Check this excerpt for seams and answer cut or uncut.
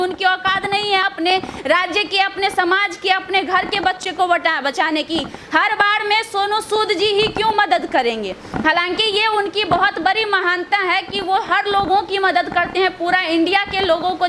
uncut